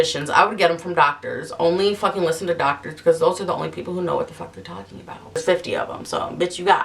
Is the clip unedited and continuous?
no; 1 cut; at 5.2 s

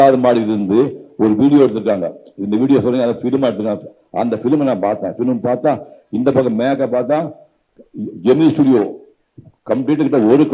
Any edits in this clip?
no; 0 cuts

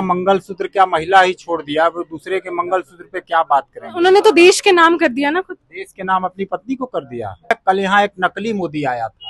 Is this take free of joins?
no; 2 cuts; at 3.8 s, 7.5 s

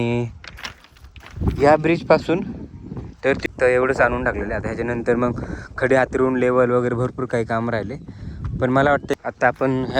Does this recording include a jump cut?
yes; 2 cuts; at 3.4 s, 9.1 s

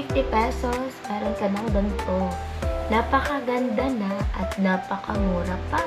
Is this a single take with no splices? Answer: yes; 0 cuts

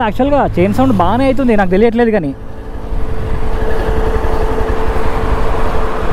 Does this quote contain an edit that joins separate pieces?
no; 0 cuts

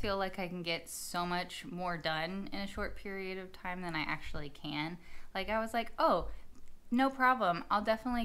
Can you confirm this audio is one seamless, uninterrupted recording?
yes; 0 cuts

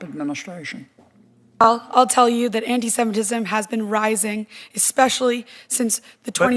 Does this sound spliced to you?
yes; 1 cut; at 1.6 s

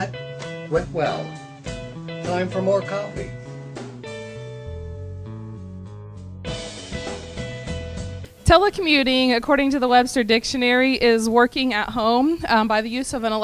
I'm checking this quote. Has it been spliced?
no; 0 cuts

